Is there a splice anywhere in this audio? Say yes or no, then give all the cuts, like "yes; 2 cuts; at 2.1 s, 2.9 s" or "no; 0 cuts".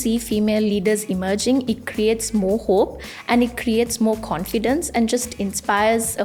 no; 0 cuts